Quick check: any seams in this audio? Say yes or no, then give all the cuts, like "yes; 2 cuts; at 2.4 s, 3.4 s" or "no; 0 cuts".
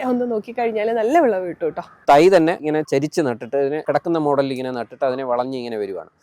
yes; 3 cuts; at 1.9 s, 2.7 s, 3.8 s